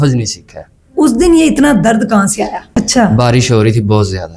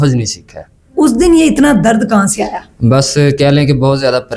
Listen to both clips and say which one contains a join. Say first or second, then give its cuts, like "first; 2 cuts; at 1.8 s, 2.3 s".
first; 1 cut; at 2.6 s